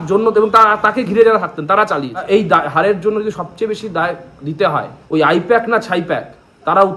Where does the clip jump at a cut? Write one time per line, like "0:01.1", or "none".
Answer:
0:02.2
0:04.9